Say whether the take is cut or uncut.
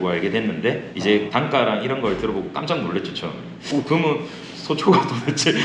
cut